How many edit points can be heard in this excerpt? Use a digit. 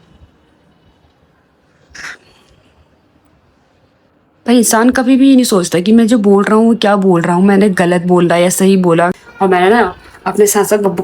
1